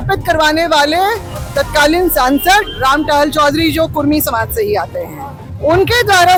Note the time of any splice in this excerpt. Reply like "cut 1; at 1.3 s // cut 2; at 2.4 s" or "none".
none